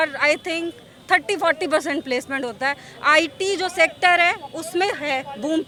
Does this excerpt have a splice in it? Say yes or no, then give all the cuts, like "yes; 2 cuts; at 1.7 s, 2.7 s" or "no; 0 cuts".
no; 0 cuts